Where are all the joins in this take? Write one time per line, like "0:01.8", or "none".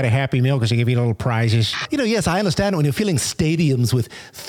0:01.9